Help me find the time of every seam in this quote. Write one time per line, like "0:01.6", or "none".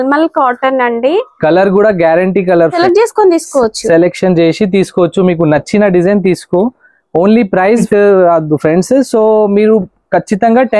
0:02.8
0:07.9

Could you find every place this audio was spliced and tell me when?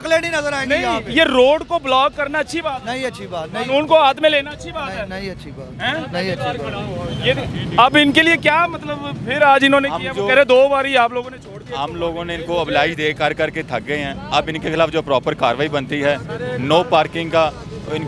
none

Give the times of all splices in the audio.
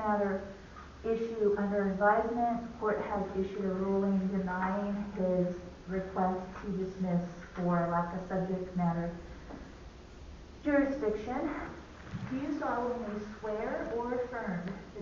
0:11.7

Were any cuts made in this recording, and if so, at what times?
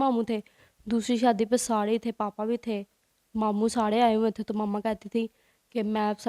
none

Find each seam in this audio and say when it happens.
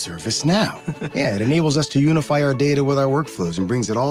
none

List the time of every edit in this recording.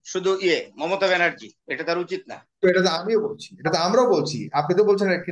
none

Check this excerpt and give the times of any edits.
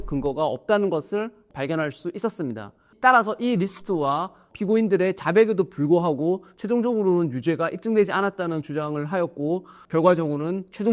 0:09.7

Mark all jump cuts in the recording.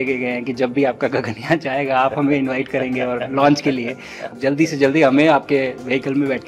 0:04.3

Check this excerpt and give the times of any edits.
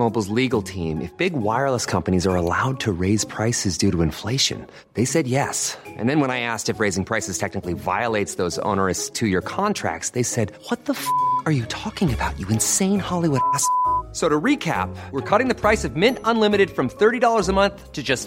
none

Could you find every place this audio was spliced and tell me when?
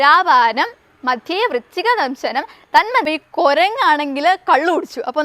0:03.1

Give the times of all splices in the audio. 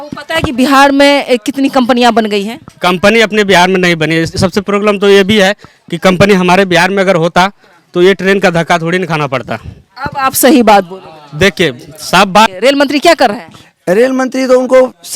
0:12.5

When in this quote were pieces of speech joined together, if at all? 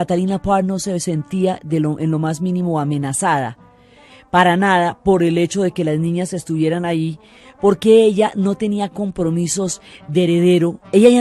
0:06.4

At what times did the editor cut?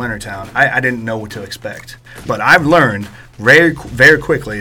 0:02.3

